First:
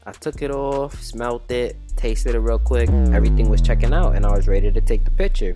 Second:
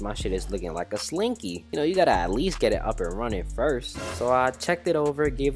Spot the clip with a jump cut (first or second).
second